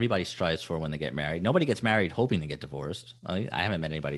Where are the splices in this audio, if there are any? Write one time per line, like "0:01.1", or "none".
none